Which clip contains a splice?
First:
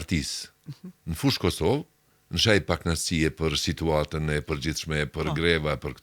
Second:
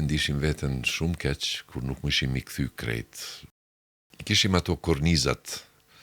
second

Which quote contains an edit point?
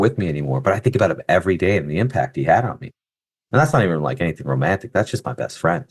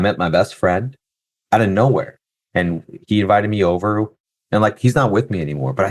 second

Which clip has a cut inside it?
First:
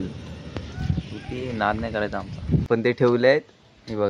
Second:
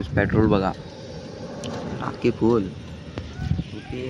first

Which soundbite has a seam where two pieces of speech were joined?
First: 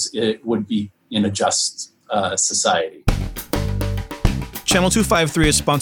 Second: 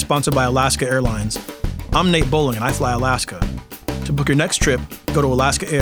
first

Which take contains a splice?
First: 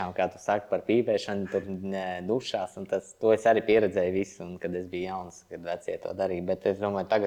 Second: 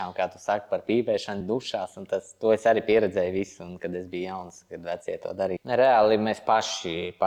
second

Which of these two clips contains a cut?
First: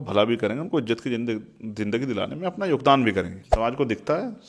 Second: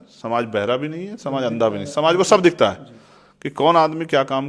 first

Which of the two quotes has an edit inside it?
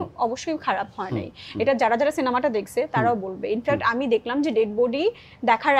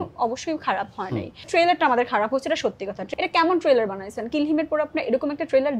second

